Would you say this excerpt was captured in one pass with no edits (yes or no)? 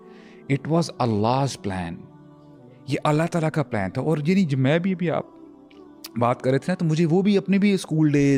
yes